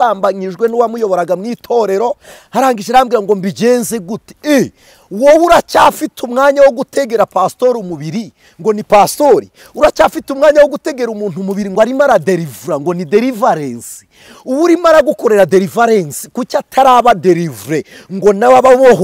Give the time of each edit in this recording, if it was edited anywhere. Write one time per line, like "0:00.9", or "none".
none